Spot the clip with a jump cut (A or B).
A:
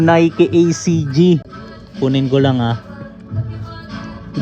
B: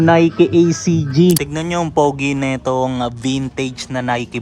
B